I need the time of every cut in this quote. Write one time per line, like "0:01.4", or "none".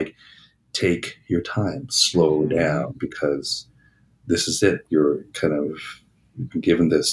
none

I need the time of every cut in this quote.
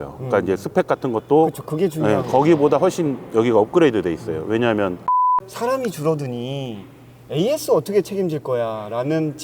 0:05.3

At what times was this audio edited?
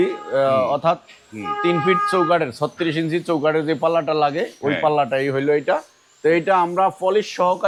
none

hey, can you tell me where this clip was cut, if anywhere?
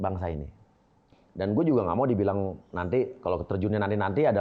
0:01.1

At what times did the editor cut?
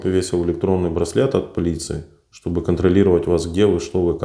none

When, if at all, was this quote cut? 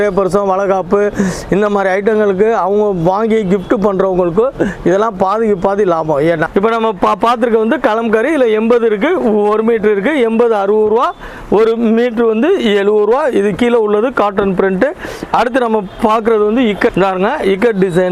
0:06.5
0:16.9

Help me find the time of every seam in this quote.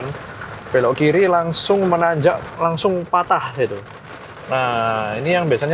none

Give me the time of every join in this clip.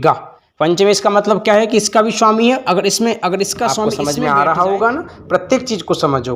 0:04.0

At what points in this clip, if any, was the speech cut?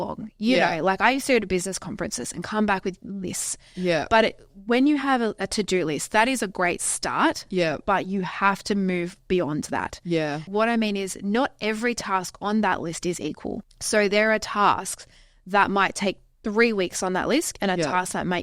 0:10.5
0:13.6

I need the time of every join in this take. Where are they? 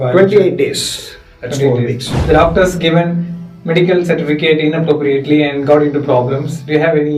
0:02.1

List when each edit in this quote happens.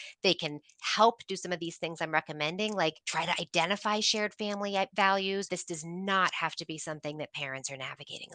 0:03.0
0:05.5

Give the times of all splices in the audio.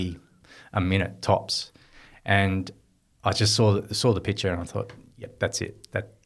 none

